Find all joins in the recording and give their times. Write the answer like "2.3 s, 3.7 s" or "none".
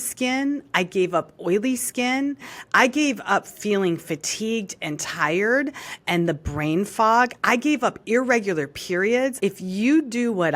9.4 s